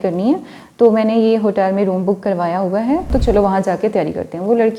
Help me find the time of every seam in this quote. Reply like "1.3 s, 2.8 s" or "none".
3.1 s